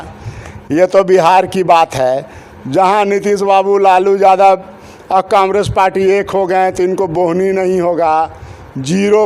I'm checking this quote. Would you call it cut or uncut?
uncut